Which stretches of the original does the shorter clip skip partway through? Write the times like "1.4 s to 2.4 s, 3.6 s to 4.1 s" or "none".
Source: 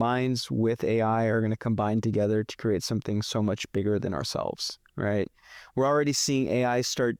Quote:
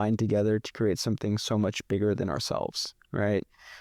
none